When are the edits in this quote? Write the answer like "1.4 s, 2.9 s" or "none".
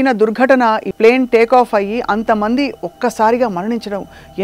0.9 s